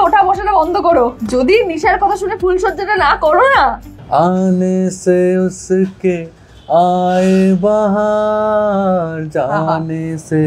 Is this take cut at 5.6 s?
no; 2 cuts; at 1.2 s, 3.9 s

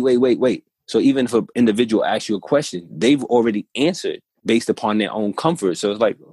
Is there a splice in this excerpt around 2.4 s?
no; 1 cut; at 4.3 s

